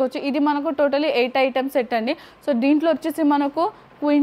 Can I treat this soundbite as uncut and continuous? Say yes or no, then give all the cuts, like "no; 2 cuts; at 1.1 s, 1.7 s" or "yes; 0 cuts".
yes; 0 cuts